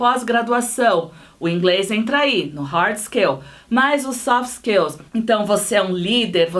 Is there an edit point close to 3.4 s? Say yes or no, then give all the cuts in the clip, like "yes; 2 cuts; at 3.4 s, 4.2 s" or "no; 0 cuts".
no; 1 cut; at 5.0 s